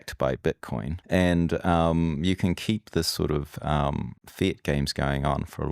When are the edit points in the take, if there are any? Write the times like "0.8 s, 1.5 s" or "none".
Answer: 0.9 s, 4.2 s